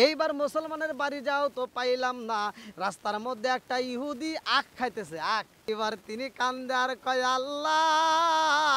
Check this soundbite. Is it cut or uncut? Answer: cut